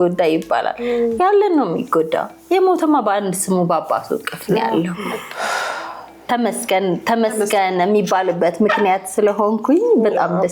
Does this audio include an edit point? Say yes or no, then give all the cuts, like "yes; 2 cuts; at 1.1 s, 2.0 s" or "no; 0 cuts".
no; 0 cuts